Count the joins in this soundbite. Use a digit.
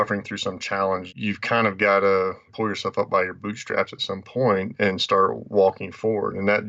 1